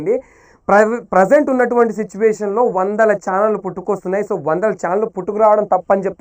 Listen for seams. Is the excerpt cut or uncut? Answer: uncut